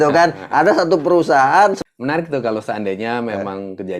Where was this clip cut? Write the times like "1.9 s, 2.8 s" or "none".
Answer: 1.8 s